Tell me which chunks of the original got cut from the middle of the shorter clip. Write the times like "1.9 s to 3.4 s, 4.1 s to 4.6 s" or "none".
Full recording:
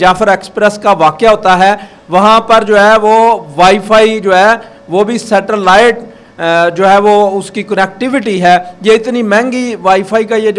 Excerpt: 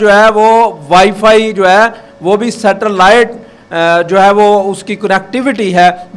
none